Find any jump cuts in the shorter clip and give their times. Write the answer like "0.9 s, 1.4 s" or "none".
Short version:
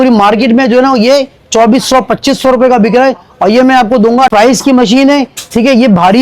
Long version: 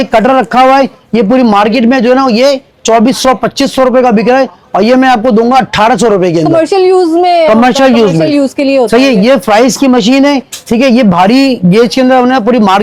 4.3 s

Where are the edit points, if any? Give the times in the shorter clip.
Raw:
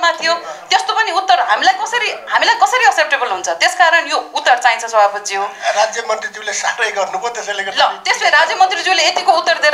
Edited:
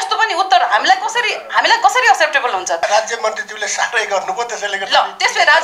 2.8 s

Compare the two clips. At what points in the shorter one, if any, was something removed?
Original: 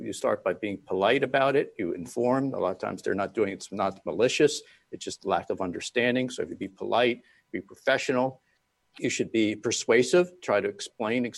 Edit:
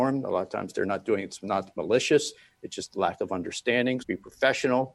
4.0 s

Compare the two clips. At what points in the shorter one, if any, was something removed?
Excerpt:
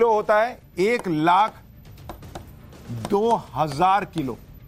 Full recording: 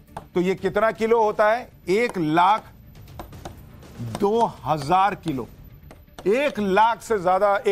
none

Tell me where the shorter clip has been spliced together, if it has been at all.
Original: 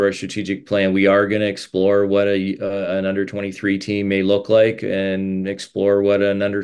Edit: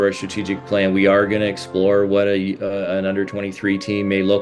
none

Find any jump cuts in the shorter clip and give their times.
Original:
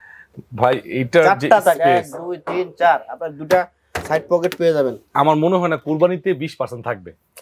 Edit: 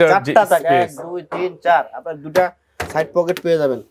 none

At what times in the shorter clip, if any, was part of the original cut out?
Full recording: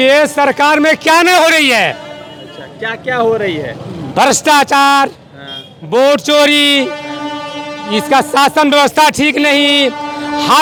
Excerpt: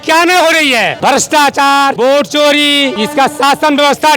1.0 s, 1.9 s, 2.9 s

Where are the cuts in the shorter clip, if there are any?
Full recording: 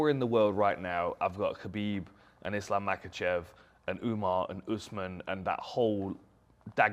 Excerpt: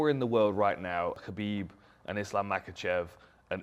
1.2 s

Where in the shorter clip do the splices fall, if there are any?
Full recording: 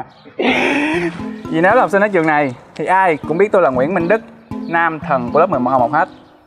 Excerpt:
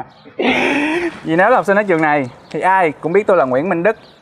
1.2 s

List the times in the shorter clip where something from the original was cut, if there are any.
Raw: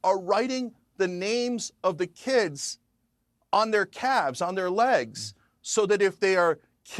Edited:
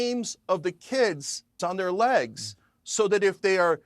1.6 s

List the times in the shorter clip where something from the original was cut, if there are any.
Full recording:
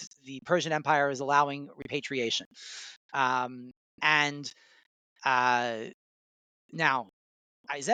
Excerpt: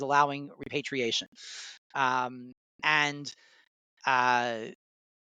none

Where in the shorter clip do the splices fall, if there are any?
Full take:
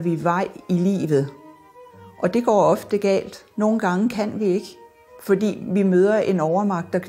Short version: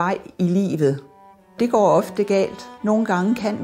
1.6 s

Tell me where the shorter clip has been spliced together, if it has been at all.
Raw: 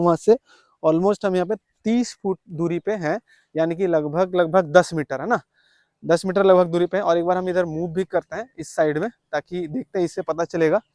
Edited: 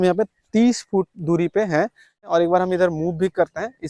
2.2 s

